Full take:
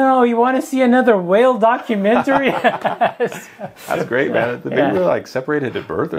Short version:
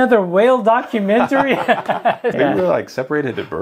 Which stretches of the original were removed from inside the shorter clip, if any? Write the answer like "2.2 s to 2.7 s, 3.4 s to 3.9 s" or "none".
3.3 s to 4.7 s